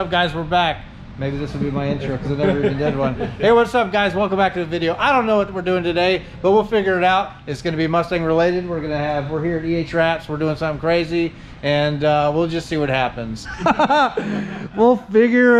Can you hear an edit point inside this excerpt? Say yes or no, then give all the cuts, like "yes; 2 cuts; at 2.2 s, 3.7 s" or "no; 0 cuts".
no; 0 cuts